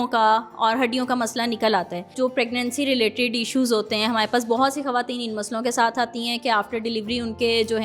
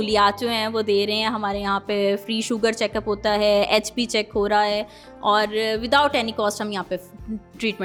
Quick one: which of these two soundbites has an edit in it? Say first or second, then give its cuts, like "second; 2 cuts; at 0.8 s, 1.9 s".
first; 1 cut; at 2.1 s